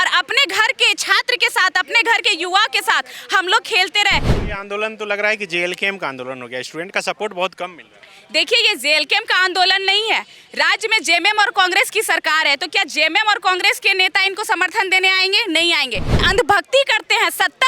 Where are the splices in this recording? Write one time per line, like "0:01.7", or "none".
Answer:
0:04.4
0:16.2